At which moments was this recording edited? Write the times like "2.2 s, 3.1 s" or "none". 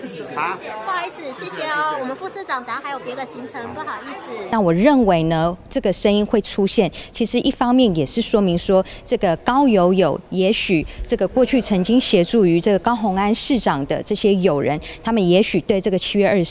4.5 s